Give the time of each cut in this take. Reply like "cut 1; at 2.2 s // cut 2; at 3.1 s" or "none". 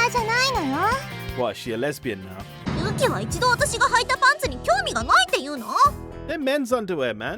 cut 1; at 2.5 s